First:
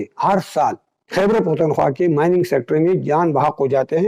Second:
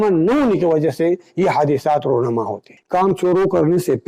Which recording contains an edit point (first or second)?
second